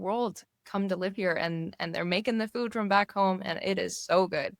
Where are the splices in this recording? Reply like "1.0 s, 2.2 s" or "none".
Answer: none